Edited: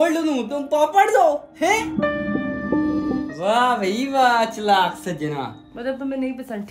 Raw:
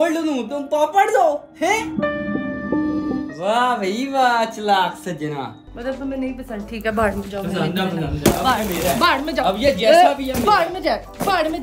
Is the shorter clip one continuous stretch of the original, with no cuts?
yes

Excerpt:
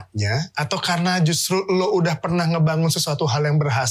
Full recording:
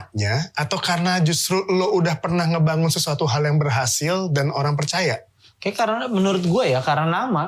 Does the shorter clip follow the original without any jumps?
yes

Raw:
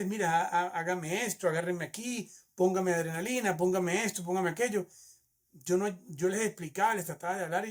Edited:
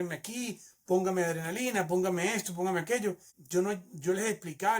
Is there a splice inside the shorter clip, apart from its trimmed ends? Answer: yes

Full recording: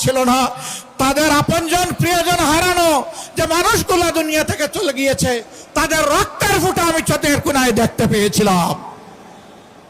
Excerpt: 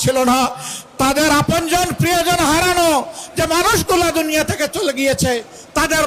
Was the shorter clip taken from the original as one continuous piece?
yes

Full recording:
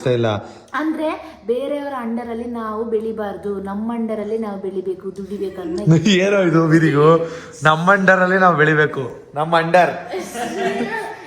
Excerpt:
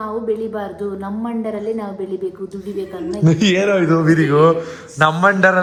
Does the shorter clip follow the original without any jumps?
yes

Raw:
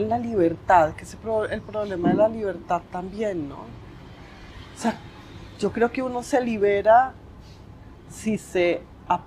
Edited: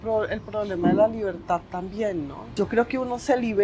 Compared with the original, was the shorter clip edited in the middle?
yes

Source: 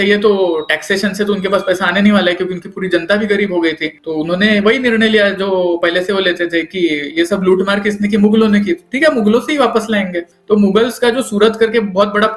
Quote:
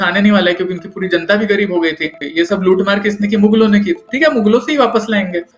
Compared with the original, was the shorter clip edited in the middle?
yes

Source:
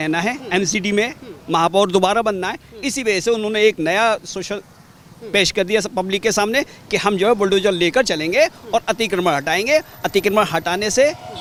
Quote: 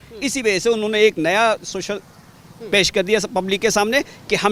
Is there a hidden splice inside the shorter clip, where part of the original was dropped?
no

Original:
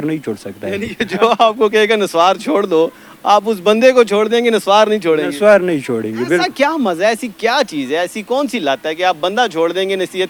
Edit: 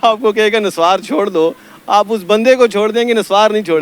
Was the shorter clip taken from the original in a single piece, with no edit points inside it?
yes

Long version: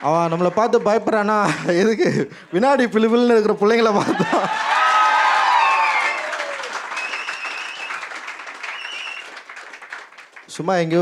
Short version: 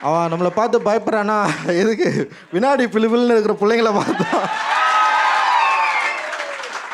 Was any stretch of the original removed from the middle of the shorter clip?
no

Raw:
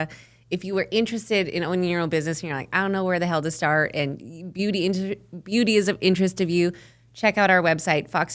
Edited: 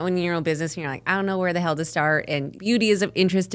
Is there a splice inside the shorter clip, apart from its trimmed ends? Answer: yes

